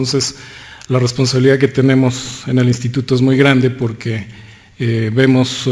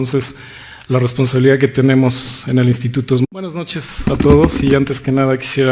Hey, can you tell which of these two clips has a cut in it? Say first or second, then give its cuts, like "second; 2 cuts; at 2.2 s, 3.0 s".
first; 1 cut; at 3.2 s